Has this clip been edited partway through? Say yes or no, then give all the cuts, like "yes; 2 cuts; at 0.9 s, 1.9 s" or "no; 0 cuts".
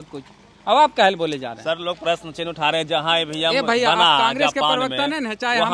no; 0 cuts